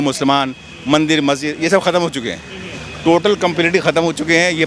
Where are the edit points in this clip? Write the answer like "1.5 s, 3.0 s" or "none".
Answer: none